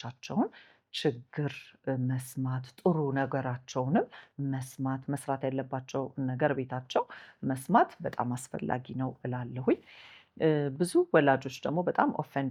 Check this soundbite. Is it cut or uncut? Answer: uncut